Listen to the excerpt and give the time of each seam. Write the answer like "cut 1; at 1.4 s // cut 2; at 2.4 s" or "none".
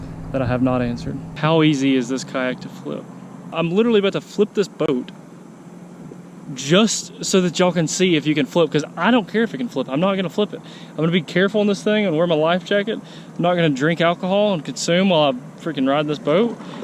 cut 1; at 1.3 s // cut 2; at 3.5 s

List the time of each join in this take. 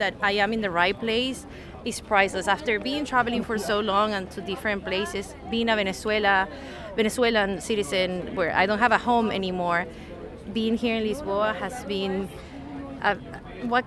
none

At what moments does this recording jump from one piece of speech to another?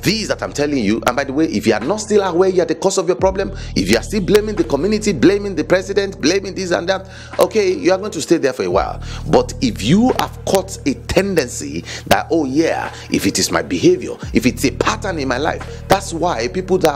none

